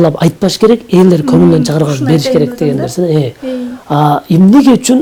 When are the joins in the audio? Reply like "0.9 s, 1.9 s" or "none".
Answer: none